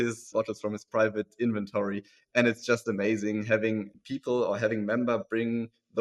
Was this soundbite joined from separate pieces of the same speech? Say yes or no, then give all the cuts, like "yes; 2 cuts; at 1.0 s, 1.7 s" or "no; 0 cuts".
no; 0 cuts